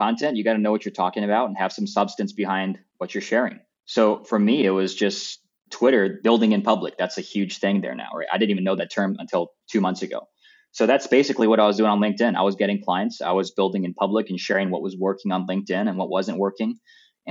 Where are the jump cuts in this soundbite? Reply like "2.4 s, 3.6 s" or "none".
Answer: 6.2 s